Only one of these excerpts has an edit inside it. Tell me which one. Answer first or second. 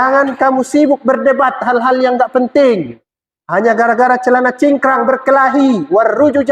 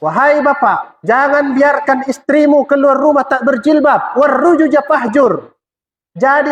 second